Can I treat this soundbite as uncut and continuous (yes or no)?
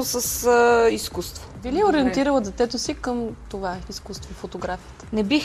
no